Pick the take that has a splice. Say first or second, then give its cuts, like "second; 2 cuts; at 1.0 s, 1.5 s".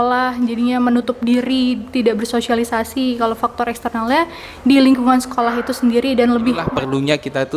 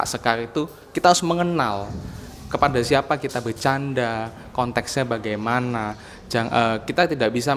first; 1 cut; at 6.7 s